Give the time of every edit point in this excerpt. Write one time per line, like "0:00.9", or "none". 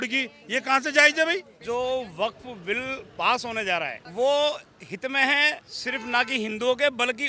0:01.6
0:04.0
0:05.7

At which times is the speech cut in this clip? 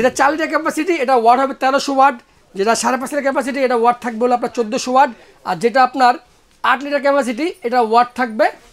none

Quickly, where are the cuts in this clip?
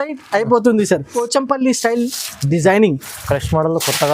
0:01.2

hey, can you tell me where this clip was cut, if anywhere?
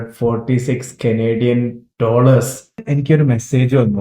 0:02.9

